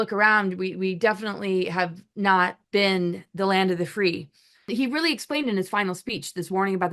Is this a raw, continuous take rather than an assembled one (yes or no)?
no